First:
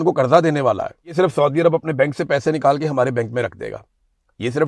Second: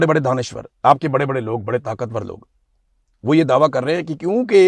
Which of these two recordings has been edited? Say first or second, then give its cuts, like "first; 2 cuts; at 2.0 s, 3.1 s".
first; 1 cut; at 1.1 s